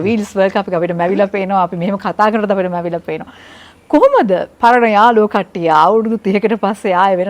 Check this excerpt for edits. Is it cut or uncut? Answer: uncut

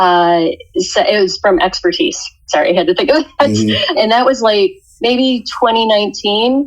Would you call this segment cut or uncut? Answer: cut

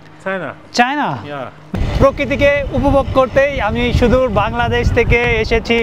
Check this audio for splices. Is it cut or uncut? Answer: cut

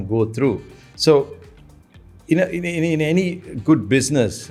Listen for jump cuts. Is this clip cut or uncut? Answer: uncut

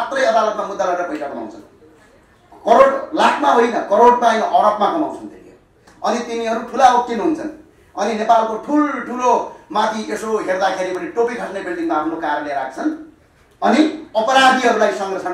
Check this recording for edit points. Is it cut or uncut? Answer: uncut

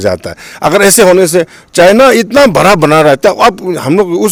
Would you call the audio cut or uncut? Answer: uncut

